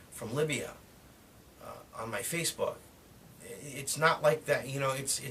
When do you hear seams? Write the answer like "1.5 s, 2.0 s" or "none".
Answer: 3.2 s